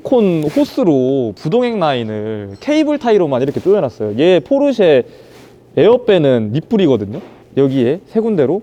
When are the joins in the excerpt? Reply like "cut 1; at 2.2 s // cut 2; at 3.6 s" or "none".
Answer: none